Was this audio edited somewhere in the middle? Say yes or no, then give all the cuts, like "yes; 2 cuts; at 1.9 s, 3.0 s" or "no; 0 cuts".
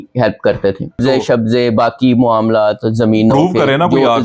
yes; 1 cut; at 1.0 s